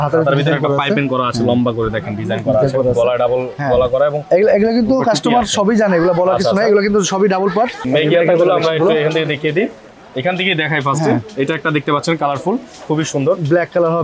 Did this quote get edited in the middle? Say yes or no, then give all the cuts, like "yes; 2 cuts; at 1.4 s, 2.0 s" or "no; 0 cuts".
yes; 1 cut; at 7.8 s